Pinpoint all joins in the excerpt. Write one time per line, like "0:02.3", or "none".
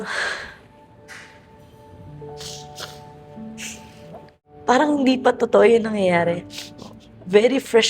0:04.4